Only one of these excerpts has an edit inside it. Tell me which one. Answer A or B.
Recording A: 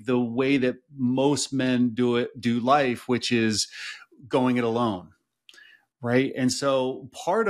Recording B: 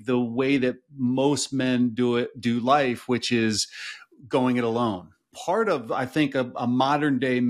B